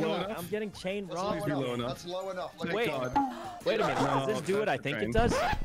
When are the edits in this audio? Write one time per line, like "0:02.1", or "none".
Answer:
none